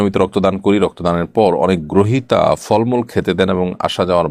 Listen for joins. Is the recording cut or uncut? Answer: uncut